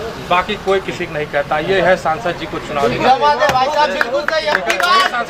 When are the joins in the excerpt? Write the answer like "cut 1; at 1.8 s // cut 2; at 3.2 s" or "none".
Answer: none